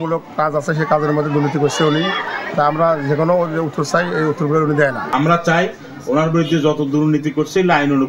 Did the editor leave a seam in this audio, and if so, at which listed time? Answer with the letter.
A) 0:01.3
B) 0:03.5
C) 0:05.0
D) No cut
C